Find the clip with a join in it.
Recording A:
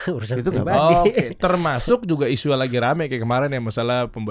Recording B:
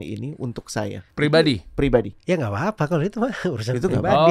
B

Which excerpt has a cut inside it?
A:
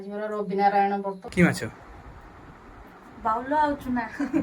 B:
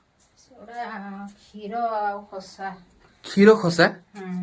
A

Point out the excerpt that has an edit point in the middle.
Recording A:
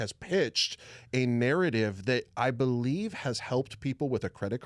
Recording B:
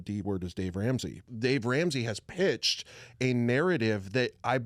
B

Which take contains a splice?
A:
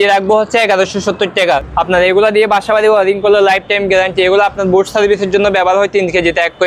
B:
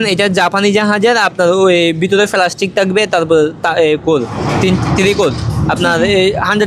A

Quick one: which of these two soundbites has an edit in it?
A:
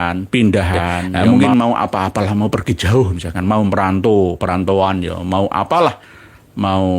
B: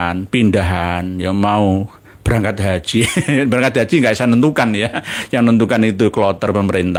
A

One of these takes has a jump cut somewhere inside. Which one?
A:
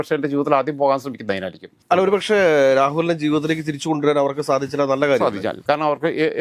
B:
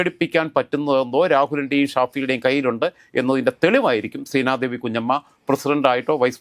A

